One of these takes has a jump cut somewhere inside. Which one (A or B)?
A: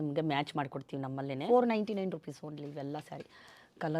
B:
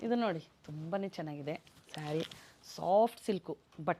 A